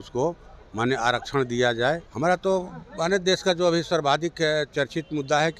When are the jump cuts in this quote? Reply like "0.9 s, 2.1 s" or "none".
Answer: 2.1 s